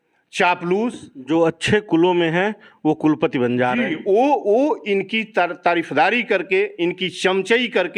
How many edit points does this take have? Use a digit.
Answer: 0